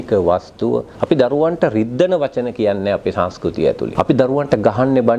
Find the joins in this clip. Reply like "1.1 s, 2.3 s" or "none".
0.9 s, 3.9 s